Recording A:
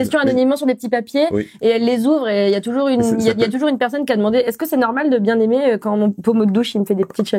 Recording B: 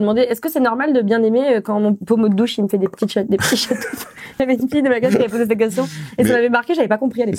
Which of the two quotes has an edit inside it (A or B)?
B